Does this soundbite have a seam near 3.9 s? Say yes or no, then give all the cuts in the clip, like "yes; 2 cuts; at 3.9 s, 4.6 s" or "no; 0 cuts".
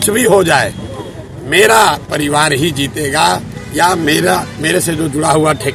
no; 0 cuts